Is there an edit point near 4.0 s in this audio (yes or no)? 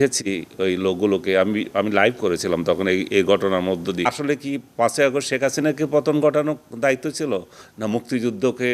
yes